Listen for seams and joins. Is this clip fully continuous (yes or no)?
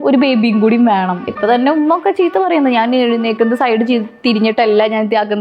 no